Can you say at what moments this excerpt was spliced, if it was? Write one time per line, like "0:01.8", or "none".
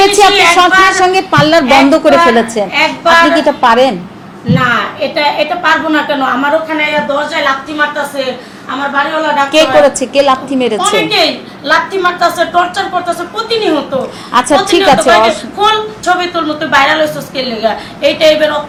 none